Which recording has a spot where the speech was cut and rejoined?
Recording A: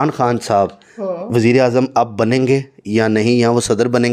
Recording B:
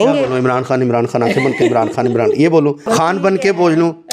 B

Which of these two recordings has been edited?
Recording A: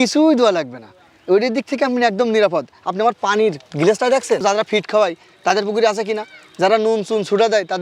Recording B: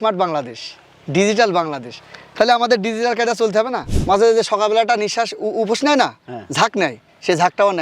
B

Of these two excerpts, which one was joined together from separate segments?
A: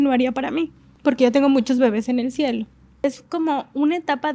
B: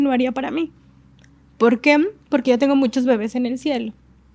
A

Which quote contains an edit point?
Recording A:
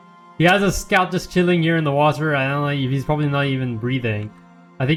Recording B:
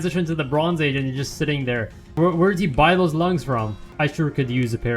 B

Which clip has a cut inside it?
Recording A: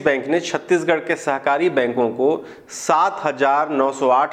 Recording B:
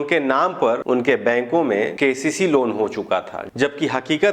B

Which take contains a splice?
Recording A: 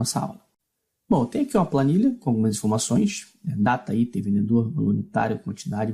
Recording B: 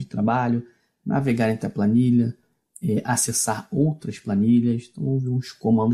A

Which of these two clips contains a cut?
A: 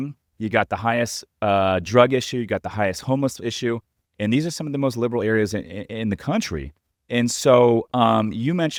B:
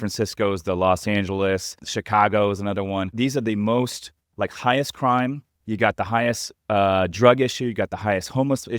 B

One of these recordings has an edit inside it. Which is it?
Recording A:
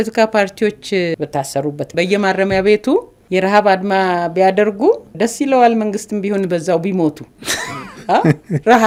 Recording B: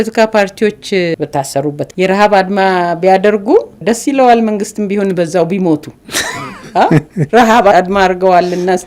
B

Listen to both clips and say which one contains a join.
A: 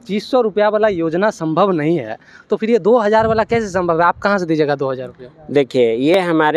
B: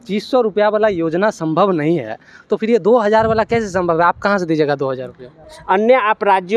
B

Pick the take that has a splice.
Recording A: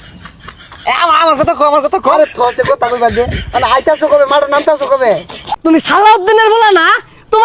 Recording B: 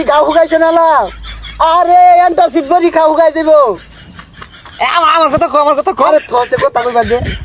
A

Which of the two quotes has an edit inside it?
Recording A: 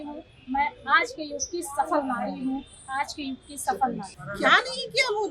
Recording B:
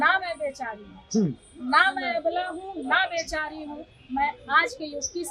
A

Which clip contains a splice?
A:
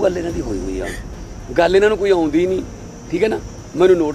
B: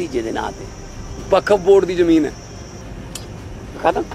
B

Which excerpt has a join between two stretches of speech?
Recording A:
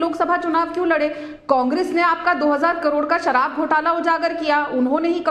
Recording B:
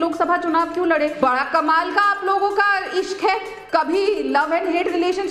B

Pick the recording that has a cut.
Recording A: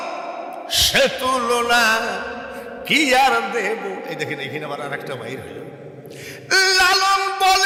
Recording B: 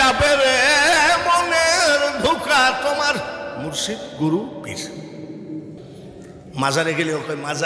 B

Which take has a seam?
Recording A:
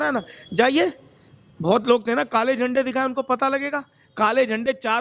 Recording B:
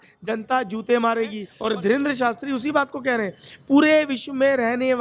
B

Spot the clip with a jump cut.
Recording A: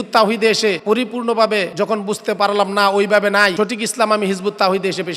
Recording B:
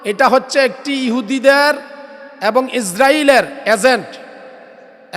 A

